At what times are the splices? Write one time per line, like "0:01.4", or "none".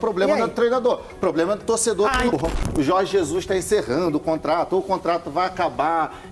0:02.3